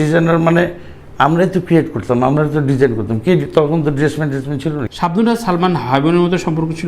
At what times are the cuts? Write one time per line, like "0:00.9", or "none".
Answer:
0:04.8